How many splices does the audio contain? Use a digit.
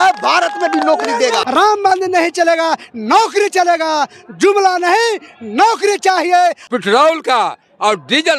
2